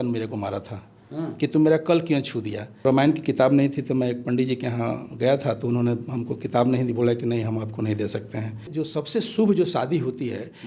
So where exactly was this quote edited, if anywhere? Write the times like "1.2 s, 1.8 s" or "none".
2.8 s, 8.7 s

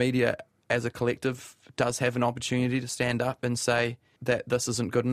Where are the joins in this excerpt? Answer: 2.9 s, 4.2 s

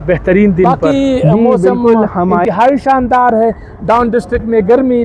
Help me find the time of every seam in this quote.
2.5 s

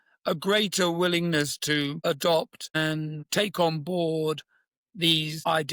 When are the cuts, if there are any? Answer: none

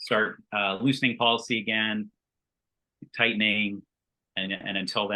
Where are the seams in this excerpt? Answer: 2.6 s

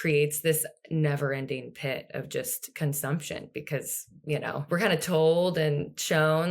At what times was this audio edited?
4.5 s

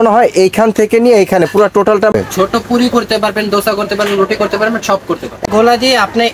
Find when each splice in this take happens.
2.1 s, 5.4 s

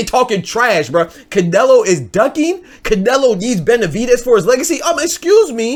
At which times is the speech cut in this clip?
none

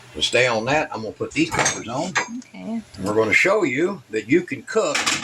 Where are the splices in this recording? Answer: 2.9 s

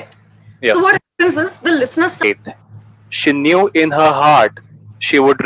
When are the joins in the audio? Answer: 2.2 s

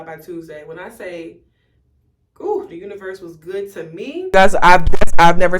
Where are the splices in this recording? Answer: 4.2 s

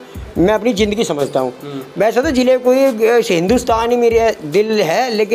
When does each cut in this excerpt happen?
none

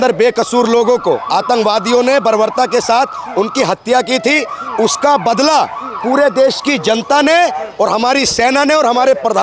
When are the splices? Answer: none

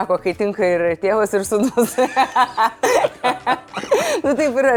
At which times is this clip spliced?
none

